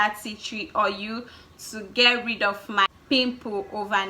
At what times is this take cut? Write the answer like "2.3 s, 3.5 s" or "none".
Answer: 2.9 s